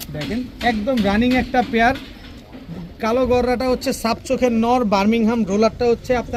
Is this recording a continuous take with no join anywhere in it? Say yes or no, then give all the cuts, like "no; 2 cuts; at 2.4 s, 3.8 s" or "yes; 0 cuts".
yes; 0 cuts